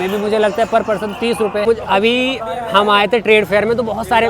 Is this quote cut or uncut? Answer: cut